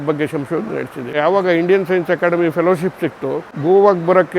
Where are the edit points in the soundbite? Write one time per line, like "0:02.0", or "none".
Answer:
0:01.2
0:03.5